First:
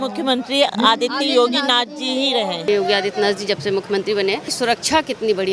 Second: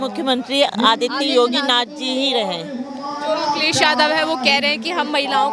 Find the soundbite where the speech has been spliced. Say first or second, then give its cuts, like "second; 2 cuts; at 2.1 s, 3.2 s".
first; 1 cut; at 2.7 s